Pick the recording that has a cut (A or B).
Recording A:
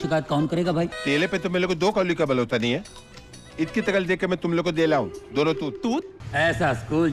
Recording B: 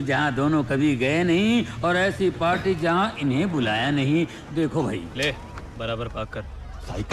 A